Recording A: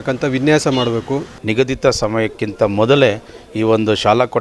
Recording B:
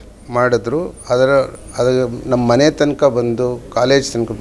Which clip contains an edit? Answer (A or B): A